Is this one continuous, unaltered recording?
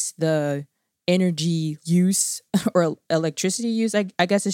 no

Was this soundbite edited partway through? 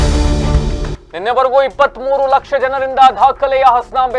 yes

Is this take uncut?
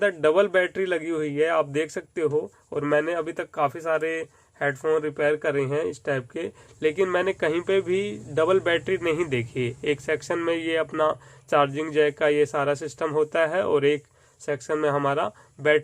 yes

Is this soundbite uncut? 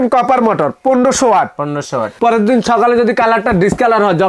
no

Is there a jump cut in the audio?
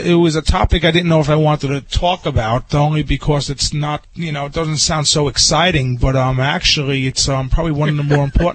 yes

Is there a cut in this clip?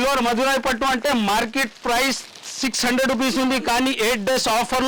no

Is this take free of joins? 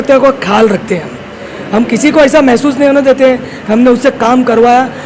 yes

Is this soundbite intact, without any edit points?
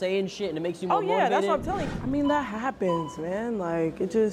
no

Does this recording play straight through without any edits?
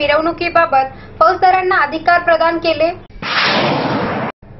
yes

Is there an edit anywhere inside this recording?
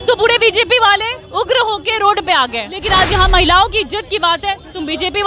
yes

